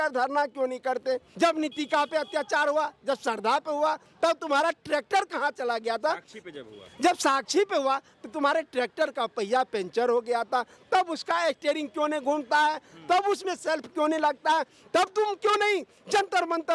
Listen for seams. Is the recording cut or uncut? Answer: cut